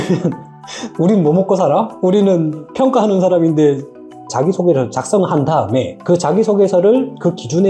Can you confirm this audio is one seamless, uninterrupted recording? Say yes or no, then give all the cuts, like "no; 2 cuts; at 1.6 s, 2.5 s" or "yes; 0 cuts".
no; 1 cut; at 4.0 s